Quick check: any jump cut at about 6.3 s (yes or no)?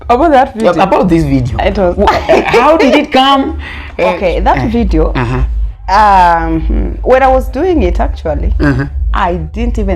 no